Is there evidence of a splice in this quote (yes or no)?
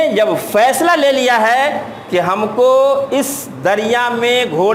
no